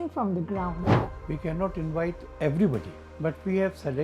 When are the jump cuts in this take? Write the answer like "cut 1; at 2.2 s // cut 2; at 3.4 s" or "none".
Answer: cut 1; at 0.9 s // cut 2; at 2.3 s // cut 3; at 3.0 s